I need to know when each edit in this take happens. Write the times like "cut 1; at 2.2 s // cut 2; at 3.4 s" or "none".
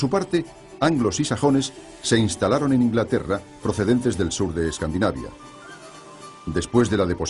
none